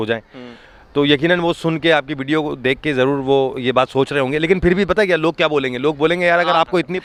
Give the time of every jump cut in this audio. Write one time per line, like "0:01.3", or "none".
none